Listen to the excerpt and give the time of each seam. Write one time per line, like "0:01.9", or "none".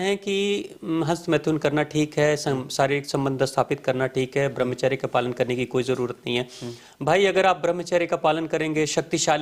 none